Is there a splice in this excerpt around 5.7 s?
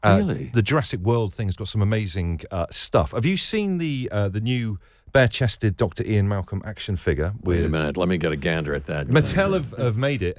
no; 1 cut; at 9.1 s

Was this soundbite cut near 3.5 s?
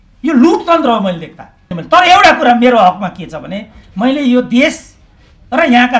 no; 1 cut; at 1.7 s

